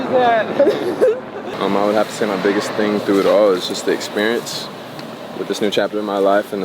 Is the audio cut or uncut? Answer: cut